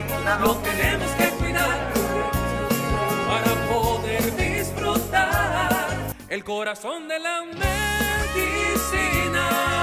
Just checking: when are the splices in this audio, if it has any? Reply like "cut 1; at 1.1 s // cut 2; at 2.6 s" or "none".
cut 1; at 6.1 s